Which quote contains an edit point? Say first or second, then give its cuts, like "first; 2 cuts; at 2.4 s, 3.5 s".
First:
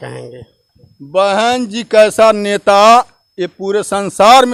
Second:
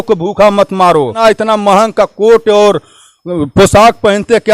second; 1 cut; at 1.2 s